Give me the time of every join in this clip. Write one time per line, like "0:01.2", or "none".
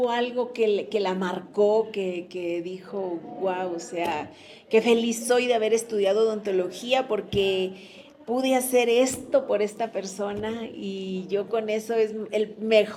none